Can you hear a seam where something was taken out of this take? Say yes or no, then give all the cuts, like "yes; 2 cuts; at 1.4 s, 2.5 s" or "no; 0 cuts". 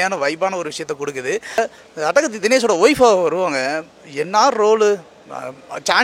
yes; 1 cut; at 1.6 s